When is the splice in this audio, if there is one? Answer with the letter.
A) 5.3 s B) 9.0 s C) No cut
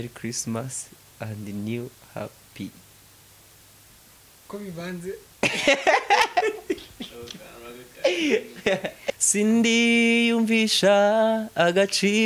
B